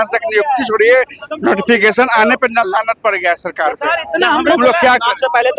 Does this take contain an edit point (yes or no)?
no